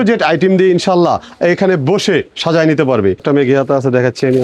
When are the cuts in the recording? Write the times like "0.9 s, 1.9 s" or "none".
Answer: 3.2 s